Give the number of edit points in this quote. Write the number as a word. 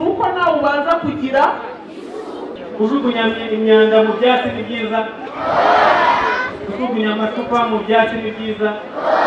one